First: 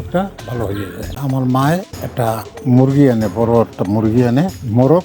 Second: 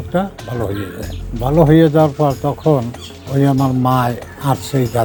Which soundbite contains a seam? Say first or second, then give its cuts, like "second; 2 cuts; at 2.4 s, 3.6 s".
first; 1 cut; at 1.2 s